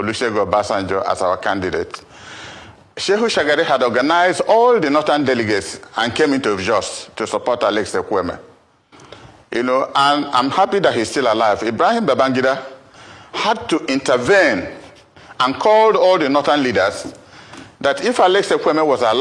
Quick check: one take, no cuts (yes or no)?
yes